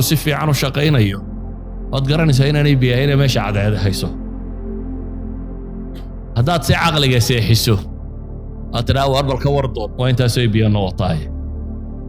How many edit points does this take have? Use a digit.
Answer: 2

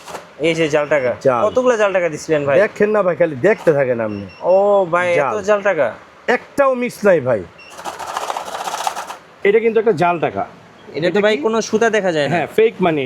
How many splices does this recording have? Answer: 1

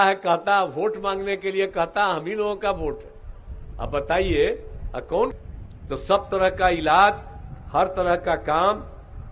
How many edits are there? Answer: 1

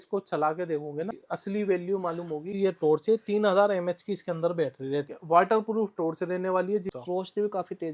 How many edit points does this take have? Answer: 4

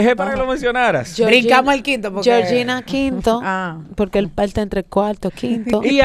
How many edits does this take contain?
0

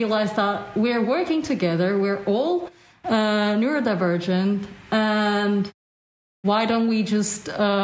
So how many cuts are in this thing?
0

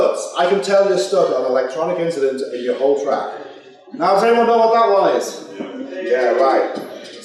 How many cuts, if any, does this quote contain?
1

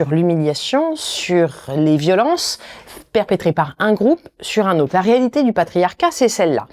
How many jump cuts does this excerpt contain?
0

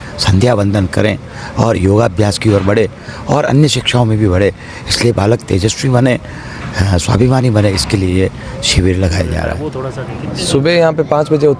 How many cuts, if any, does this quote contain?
1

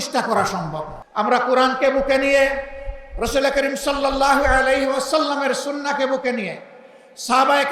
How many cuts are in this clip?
1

